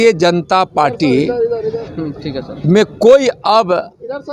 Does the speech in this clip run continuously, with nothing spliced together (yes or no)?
yes